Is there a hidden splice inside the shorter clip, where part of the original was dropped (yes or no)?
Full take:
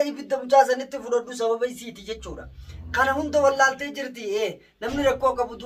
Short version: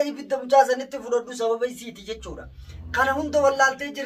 no